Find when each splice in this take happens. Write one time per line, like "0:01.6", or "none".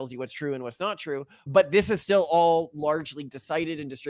0:01.5